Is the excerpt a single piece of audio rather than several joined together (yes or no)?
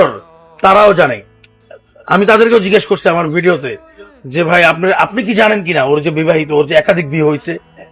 yes